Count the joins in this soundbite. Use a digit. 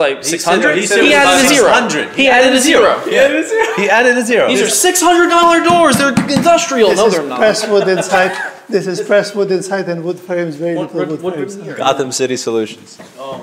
0